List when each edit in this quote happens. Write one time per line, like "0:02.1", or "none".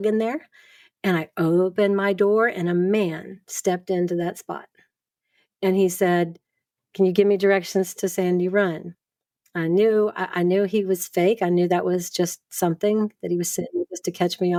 none